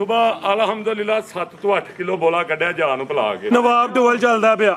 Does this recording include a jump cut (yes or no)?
yes